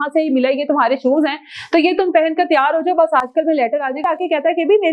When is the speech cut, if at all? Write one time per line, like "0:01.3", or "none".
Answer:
0:04.0